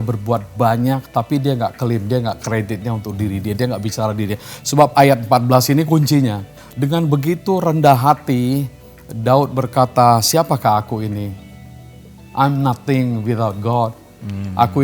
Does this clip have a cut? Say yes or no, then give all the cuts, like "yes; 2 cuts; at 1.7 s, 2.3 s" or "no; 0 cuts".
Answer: yes; 1 cut; at 6.6 s